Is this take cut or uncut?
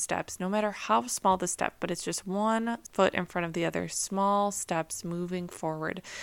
cut